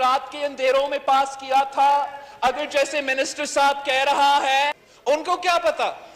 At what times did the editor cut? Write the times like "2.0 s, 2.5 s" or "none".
4.9 s